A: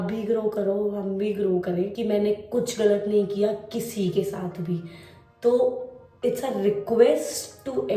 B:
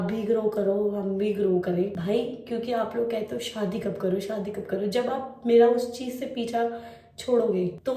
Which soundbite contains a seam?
A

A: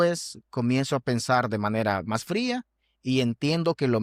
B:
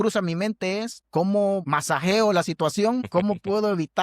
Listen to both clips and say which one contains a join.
B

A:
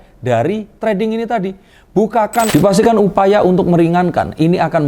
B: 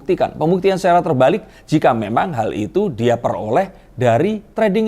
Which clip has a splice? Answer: A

